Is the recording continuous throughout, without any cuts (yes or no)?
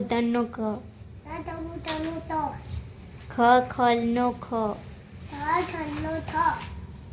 yes